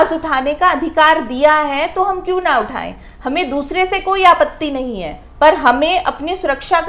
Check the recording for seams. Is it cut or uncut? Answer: uncut